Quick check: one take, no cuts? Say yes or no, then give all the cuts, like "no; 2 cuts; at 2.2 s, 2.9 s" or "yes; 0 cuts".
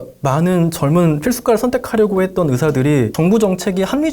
no; 1 cut; at 3.1 s